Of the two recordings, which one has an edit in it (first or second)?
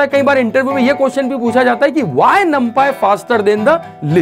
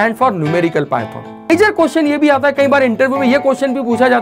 second